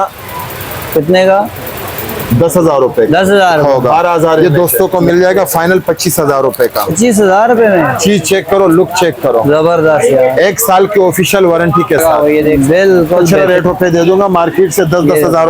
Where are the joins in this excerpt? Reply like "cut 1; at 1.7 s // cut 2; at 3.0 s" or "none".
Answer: cut 1; at 4.4 s // cut 2; at 13.3 s